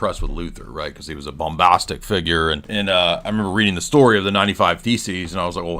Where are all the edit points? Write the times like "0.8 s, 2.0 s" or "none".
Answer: 2.6 s